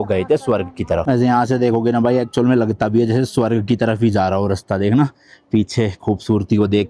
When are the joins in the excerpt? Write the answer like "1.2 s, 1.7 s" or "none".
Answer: 1.0 s